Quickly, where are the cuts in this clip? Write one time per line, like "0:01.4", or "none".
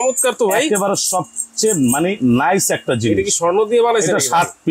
none